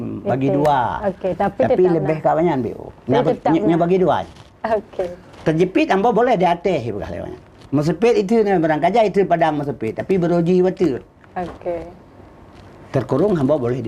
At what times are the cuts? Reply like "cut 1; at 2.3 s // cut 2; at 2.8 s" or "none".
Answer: none

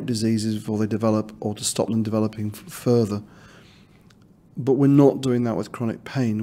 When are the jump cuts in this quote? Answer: none

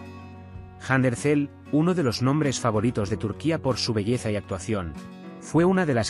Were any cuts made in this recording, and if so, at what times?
none

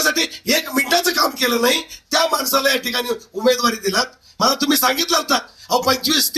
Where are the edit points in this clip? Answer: cut 1; at 4.2 s

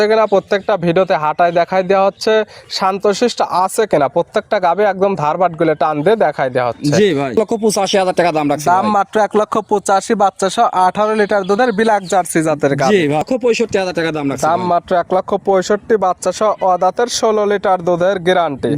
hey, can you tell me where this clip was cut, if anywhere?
cut 1; at 7.3 s // cut 2; at 13.2 s

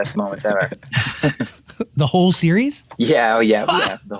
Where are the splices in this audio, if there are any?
cut 1; at 2.8 s

